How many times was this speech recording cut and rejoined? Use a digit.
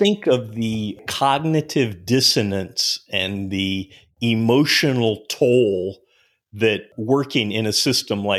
2